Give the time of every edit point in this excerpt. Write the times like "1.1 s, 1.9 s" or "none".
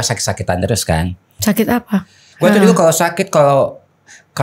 1.4 s, 2.2 s

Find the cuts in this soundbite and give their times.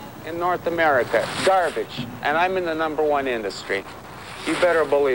none

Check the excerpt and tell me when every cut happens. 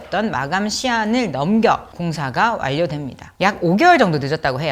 none

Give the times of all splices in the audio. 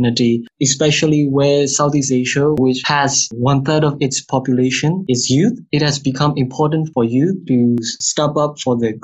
none

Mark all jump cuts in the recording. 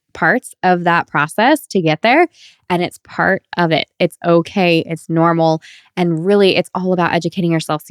none

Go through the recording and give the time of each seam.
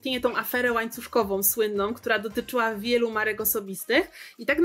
none

